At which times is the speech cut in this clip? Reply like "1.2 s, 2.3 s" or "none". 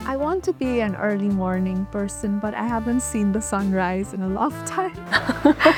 none